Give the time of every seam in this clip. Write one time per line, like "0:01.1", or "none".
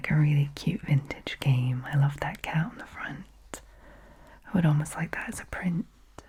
none